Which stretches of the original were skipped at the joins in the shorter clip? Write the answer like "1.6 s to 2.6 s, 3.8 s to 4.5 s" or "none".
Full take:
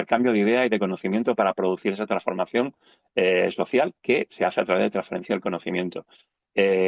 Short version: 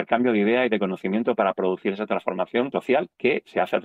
2.7 s to 3.6 s